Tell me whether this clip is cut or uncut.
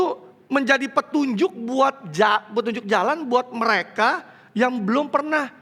uncut